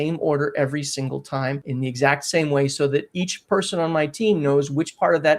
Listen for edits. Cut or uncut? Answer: cut